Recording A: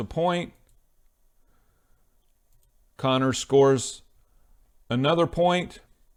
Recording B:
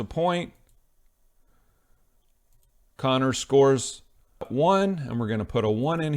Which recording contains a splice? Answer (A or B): B